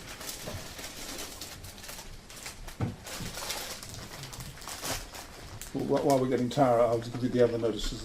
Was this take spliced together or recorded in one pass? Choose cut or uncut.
cut